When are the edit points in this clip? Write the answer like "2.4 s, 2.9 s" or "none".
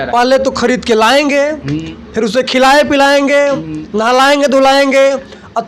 none